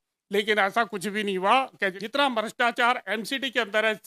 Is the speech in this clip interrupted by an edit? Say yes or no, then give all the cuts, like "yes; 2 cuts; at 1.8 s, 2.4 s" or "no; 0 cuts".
yes; 1 cut; at 2.0 s